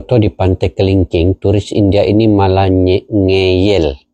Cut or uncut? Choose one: uncut